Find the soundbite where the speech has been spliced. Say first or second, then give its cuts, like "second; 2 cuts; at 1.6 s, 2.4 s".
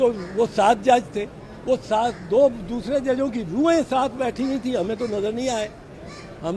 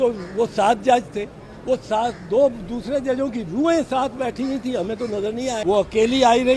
second; 1 cut; at 5.6 s